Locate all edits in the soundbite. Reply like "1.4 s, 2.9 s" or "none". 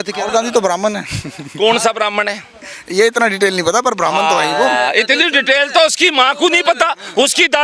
none